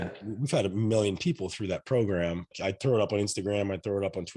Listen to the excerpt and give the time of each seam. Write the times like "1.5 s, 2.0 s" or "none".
2.5 s